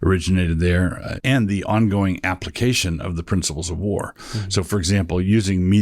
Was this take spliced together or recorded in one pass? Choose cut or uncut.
cut